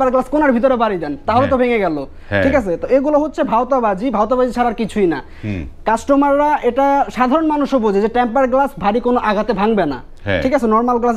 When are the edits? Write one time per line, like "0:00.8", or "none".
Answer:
none